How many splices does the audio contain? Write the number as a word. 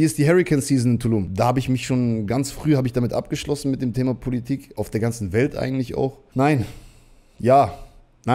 two